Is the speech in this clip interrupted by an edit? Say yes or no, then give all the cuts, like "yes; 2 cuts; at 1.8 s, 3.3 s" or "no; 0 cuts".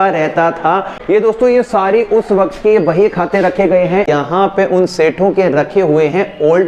yes; 2 cuts; at 1.1 s, 4.1 s